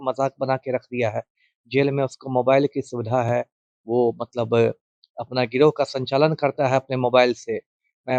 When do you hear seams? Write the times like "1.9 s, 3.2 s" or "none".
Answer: none